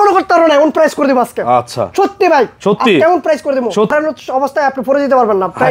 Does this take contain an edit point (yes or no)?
yes